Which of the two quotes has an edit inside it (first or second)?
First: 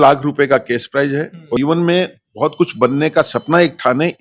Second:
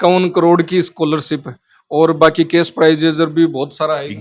first